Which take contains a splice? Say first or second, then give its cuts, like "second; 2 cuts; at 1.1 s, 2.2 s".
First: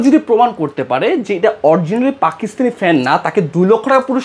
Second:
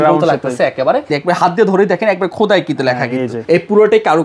second; 2 cuts; at 1.1 s, 3.4 s